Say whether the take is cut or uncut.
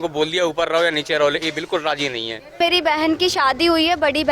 cut